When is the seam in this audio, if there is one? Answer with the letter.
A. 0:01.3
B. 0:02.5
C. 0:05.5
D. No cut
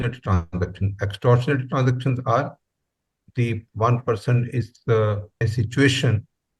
C